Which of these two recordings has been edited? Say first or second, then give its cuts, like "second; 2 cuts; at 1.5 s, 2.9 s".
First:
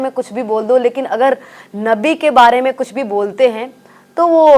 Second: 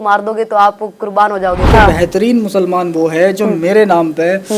second; 1 cut; at 1.7 s